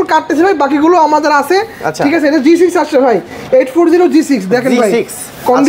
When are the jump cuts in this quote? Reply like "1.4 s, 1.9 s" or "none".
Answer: none

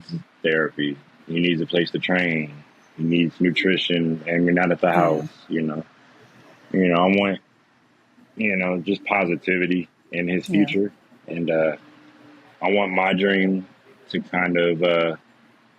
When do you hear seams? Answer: none

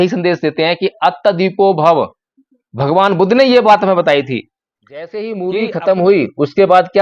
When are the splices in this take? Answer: 5.2 s

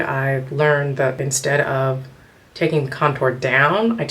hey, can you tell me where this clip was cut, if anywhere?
1.2 s

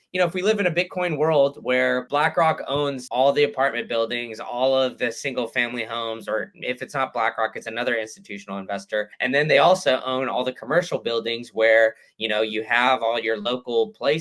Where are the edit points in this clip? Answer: 3.0 s, 9.1 s

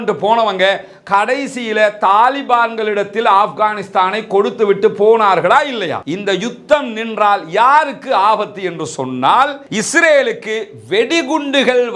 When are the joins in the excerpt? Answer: 6.0 s, 9.7 s

